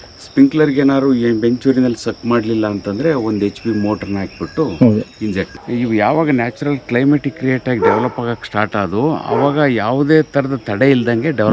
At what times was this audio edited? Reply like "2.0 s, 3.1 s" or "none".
5.5 s